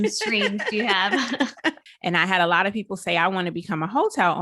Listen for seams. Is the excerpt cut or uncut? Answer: cut